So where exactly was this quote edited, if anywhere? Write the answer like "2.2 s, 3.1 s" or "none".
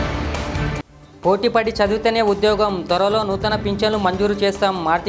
none